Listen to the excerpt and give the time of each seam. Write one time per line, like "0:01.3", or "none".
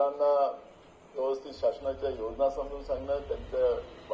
none